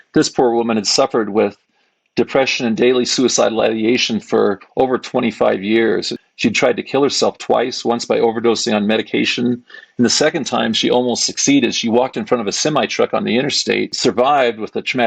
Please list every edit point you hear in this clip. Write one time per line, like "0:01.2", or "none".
0:06.1
0:13.9